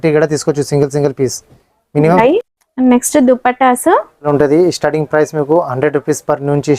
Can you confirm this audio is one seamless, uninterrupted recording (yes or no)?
no